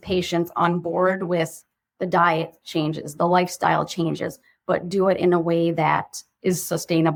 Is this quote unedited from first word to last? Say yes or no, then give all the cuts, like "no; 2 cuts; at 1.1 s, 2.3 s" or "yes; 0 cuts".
yes; 0 cuts